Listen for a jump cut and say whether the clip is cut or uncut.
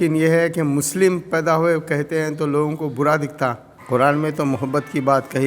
cut